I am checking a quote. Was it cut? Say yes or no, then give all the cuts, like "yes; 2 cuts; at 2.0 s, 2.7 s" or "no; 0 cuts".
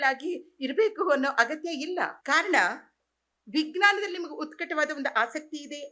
yes; 1 cut; at 2.2 s